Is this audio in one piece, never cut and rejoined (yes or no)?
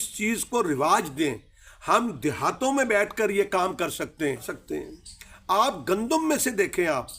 no